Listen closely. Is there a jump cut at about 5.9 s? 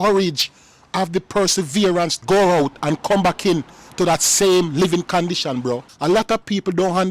yes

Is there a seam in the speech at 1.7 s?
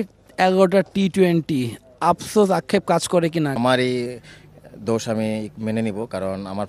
no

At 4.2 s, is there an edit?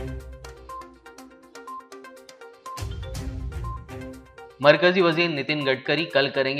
no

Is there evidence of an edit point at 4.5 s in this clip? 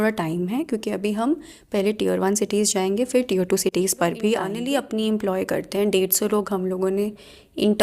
yes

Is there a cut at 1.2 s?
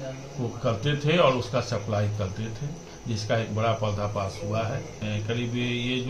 no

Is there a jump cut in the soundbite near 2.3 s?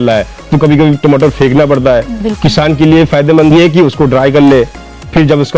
no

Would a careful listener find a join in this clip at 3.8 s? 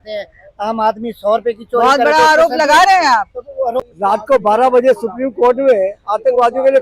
yes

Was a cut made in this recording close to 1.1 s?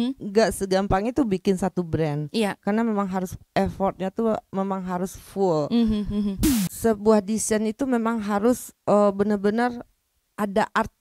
no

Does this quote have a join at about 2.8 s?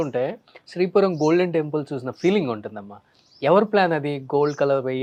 no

